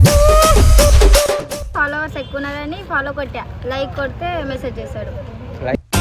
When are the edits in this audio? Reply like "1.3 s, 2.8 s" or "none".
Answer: 1.7 s